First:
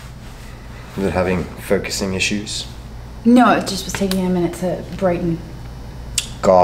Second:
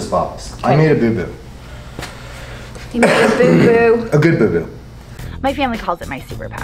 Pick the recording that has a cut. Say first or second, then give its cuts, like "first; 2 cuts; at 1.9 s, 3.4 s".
second; 1 cut; at 5.3 s